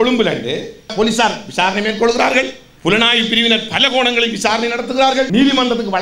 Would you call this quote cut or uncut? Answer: cut